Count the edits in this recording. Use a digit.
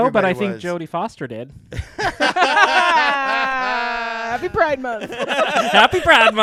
0